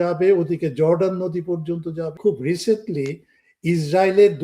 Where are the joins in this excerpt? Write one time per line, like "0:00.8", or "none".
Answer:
0:02.1